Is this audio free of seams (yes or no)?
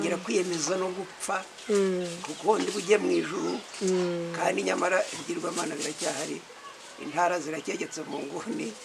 yes